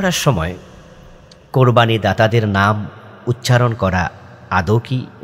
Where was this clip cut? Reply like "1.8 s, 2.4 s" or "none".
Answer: none